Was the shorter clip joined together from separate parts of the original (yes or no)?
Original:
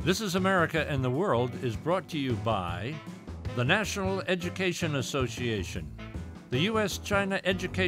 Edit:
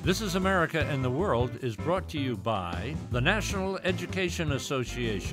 yes